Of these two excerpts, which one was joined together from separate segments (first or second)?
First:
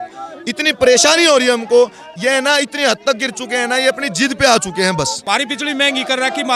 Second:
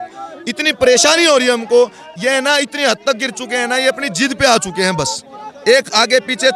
first